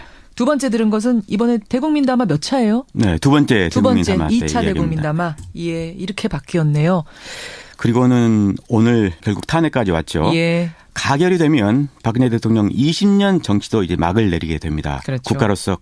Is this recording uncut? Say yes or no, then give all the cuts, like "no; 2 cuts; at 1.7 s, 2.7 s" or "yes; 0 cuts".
no; 1 cut; at 10.4 s